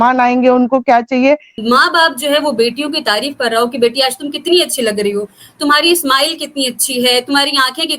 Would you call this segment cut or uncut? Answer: cut